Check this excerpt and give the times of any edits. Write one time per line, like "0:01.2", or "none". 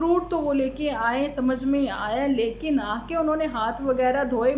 none